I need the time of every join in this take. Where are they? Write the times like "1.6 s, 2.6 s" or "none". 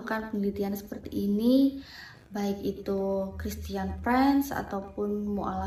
none